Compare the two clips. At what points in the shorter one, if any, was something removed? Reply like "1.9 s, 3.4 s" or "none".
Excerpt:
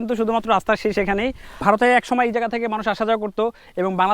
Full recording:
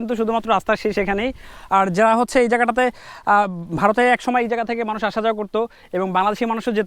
1.5 s